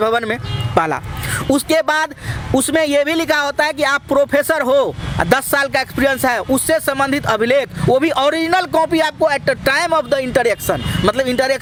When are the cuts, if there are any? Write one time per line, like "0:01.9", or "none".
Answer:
none